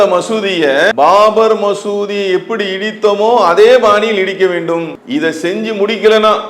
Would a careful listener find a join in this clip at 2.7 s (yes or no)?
no